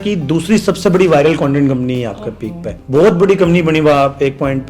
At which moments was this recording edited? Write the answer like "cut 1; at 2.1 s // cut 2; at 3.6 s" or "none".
cut 1; at 2.7 s